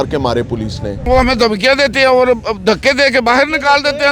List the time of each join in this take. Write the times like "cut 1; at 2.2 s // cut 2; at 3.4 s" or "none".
cut 1; at 1.0 s